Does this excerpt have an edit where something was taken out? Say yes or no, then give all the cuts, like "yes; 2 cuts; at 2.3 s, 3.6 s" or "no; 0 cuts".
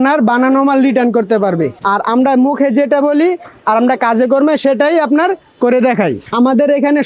yes; 2 cuts; at 1.8 s, 6.2 s